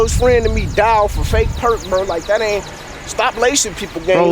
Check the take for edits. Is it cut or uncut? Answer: uncut